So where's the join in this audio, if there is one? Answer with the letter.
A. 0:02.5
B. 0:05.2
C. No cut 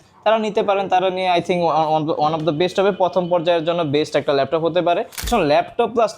B